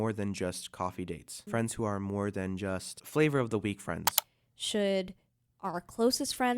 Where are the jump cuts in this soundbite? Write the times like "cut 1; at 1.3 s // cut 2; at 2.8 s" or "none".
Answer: cut 1; at 1.3 s // cut 2; at 3.0 s // cut 3; at 4.3 s